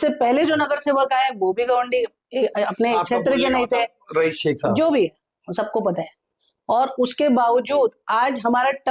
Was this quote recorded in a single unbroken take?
yes; 0 cuts

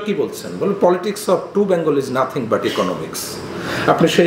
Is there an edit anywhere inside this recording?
no; 0 cuts

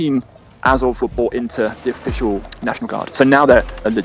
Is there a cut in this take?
no; 0 cuts

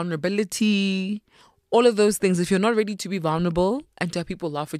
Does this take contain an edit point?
no; 0 cuts

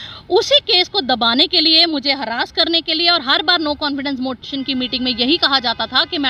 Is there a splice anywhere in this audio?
no; 0 cuts

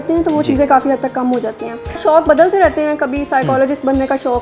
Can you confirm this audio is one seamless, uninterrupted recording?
no; 1 cut; at 2.0 s

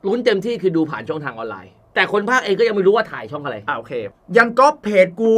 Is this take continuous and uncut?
no; 2 cuts; at 1.8 s, 4.0 s

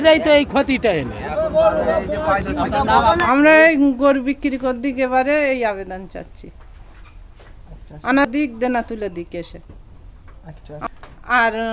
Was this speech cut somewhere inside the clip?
yes; 1 cut; at 3.2 s

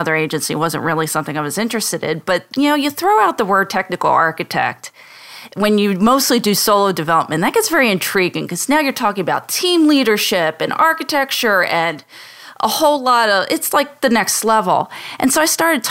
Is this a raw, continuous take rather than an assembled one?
yes; 0 cuts

